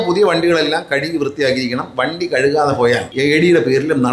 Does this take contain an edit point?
yes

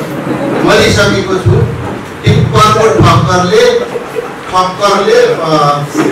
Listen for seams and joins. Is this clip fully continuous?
yes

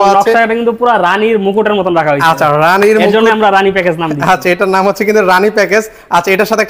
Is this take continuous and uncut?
yes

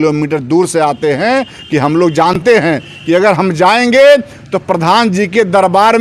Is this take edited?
no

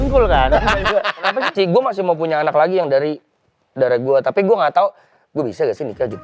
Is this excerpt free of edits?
no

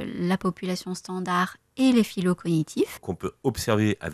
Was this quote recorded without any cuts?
no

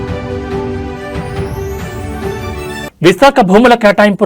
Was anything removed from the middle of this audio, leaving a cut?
yes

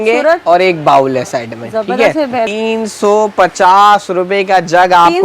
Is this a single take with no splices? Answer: no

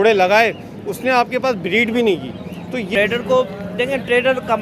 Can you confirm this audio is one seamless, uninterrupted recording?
no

